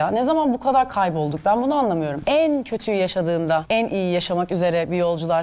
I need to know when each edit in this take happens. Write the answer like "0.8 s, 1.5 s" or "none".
2.2 s, 3.6 s